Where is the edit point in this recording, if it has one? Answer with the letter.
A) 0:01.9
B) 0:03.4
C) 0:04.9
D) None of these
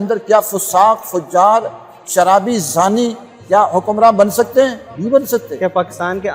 C